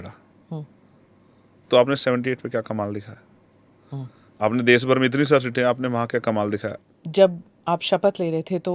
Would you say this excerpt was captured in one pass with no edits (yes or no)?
no